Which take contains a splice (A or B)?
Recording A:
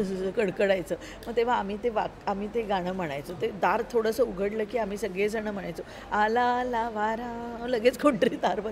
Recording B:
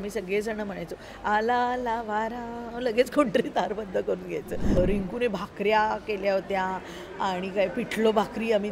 B